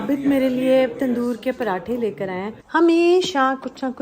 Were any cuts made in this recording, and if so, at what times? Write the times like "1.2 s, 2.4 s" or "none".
2.5 s